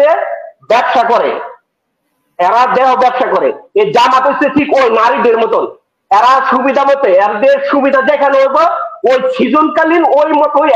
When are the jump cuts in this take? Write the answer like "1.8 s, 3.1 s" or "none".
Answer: none